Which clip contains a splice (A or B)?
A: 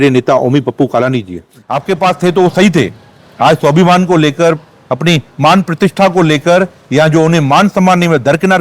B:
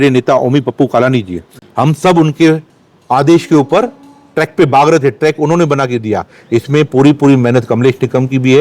A